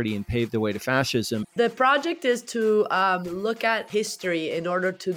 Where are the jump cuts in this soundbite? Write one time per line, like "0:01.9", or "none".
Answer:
0:01.5
0:03.9